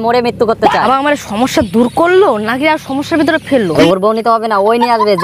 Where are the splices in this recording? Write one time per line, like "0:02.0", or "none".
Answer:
0:00.8
0:03.7